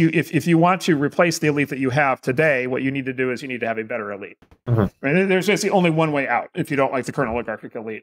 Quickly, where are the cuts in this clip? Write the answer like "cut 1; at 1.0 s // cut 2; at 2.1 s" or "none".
none